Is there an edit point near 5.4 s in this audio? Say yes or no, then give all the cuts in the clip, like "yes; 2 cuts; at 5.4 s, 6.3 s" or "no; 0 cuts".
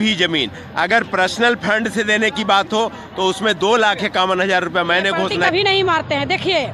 yes; 1 cut; at 5.4 s